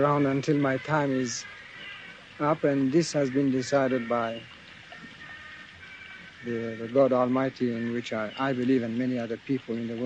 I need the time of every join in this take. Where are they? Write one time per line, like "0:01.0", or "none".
none